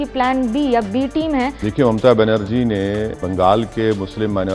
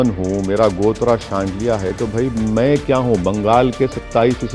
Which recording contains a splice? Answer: first; 2 cuts; at 1.6 s, 3.2 s

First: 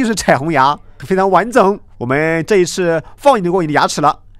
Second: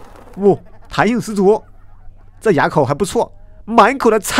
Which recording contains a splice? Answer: first; 2 cuts; at 0.9 s, 1.9 s

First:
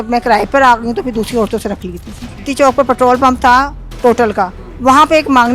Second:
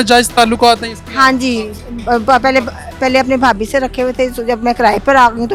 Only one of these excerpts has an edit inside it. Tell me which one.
first; 2 cuts; at 2.5 s, 4.6 s

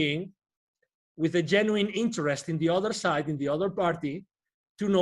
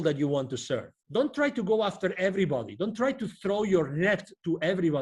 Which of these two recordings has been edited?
second; 1 cut; at 1.0 s

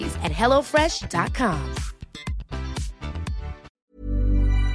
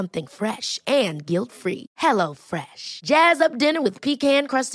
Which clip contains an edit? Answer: first; 1 cut; at 3.8 s

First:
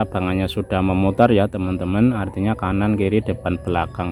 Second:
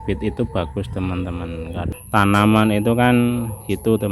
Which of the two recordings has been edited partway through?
second; 1 cut; at 1.8 s

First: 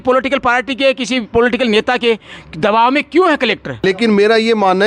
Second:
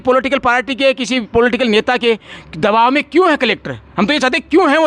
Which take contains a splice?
first; 1 cut; at 3.8 s

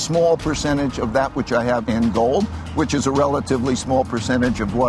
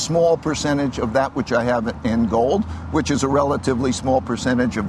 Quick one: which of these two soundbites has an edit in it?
first; 1 cut; at 1.8 s

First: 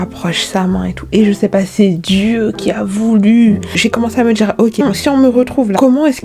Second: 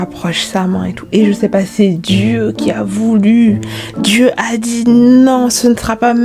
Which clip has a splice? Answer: first; 1 cut; at 3.8 s

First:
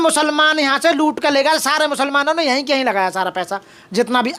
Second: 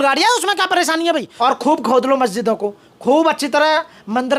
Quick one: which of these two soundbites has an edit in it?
second; 1 cut; at 1.3 s

